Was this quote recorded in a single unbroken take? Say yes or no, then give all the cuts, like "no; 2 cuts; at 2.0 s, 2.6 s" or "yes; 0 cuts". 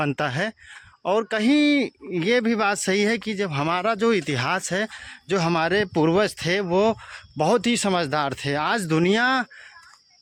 yes; 0 cuts